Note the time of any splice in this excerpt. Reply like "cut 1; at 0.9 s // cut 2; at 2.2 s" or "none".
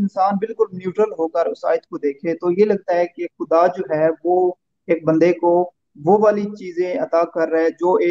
none